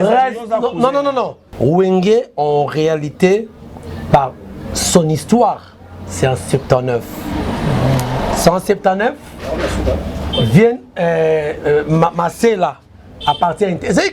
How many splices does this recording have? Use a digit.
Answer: 1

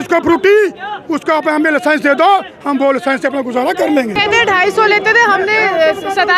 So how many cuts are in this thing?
1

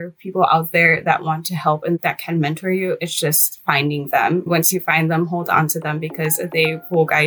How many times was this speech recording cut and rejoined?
2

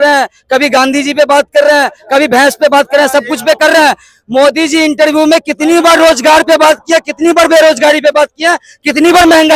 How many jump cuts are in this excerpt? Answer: 0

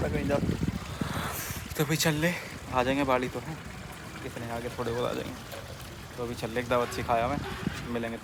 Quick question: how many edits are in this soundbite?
0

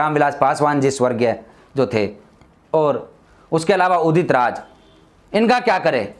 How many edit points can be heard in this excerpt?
0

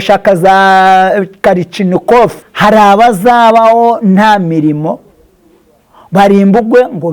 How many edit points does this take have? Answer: 1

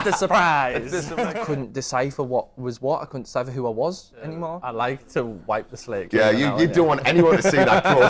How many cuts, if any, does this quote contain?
2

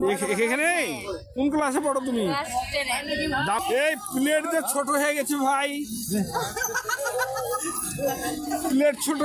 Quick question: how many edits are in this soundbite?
1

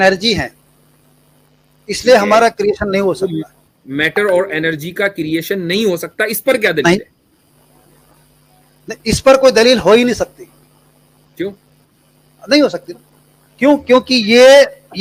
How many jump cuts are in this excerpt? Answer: 0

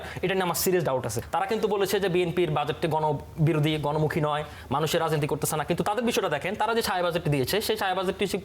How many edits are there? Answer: 1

